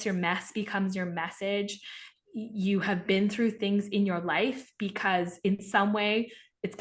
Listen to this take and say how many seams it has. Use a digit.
0